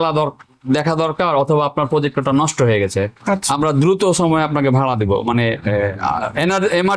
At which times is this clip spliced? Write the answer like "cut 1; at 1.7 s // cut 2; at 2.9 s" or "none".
none